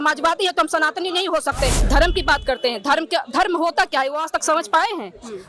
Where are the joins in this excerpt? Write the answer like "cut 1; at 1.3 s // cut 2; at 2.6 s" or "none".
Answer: cut 1; at 1.8 s